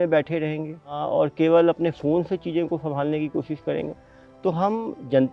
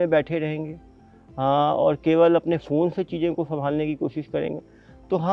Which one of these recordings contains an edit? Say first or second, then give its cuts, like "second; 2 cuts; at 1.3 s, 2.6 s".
first; 1 cut; at 1.0 s